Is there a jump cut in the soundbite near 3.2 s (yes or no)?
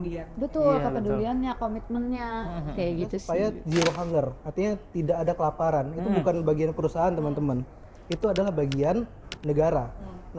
yes